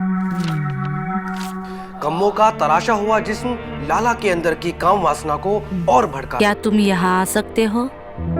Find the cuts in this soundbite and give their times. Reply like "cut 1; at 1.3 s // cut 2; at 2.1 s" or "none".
cut 1; at 6.3 s